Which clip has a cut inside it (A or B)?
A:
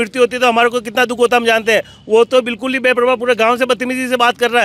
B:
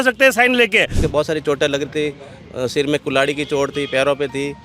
B